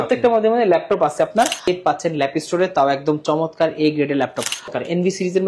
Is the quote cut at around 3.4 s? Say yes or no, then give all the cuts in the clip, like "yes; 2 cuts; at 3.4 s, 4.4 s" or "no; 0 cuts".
no; 2 cuts; at 1.7 s, 4.7 s